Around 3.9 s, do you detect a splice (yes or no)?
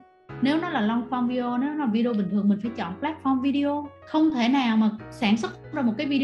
yes